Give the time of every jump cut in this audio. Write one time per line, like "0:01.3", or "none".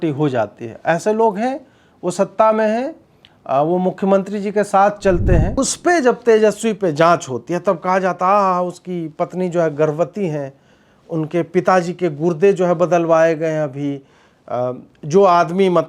0:05.5